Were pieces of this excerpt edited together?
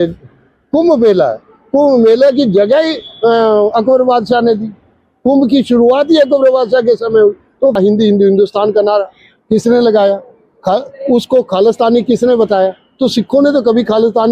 yes; 1 cut; at 7.7 s

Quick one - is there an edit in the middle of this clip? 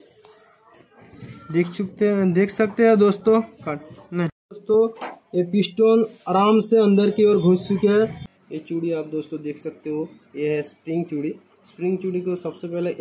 yes; 1 cut; at 8.2 s

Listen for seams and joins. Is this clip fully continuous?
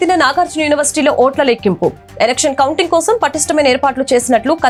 yes; 0 cuts

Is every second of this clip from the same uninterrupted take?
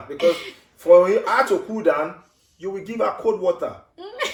yes; 0 cuts

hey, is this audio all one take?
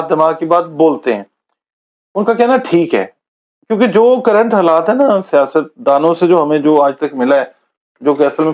yes; 0 cuts

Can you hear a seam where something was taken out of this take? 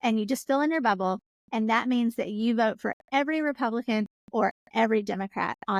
no; 0 cuts

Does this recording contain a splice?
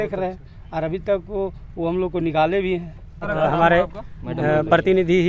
yes; 1 cut; at 3.2 s

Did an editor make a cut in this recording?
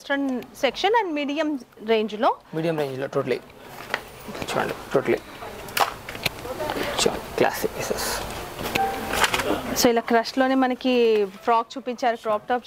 no; 0 cuts

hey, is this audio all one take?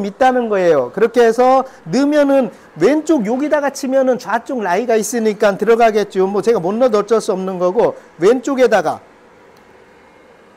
yes; 0 cuts

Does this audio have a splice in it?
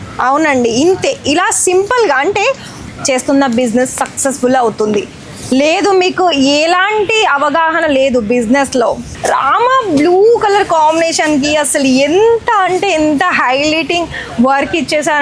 yes; 2 cuts; at 2.8 s, 9.1 s

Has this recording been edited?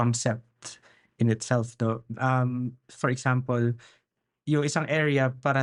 no; 0 cuts

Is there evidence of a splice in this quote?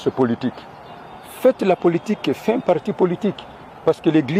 no; 0 cuts

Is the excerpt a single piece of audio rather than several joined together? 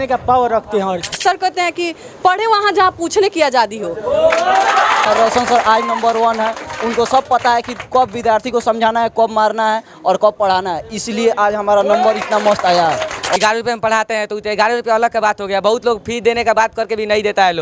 no; 3 cuts; at 1.2 s, 5.1 s, 13.4 s

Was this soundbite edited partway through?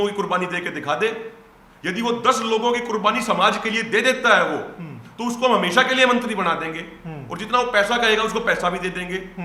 no; 0 cuts

